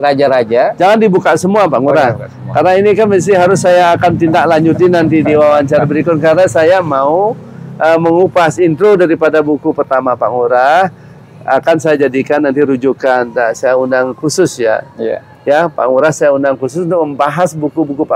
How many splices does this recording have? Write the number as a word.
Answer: zero